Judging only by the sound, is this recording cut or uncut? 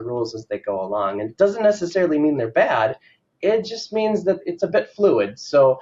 cut